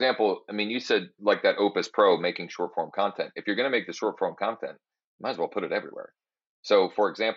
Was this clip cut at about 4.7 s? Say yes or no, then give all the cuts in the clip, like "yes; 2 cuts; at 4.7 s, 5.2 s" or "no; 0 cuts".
no; 1 cut; at 1.1 s